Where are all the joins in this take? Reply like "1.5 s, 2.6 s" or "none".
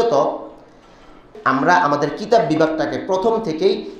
1.3 s